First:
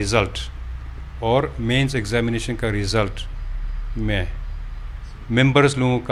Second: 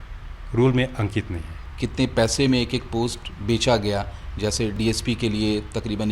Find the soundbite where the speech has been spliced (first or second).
second